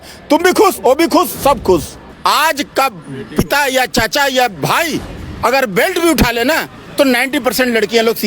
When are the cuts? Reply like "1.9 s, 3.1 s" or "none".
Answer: 2.1 s